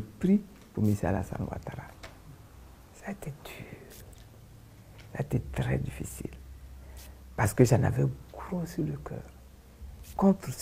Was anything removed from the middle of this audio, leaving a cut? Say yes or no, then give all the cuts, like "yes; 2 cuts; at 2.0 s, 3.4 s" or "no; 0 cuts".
no; 0 cuts